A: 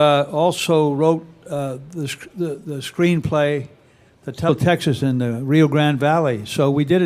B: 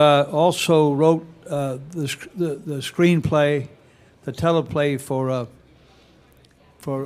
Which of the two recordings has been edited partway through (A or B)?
B